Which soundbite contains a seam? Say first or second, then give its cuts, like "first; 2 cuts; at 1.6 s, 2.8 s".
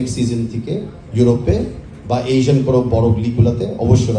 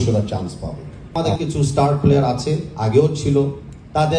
second; 1 cut; at 1.1 s